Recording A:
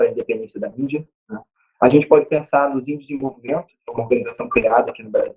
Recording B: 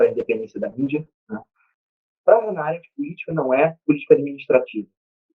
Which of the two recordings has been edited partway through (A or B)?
B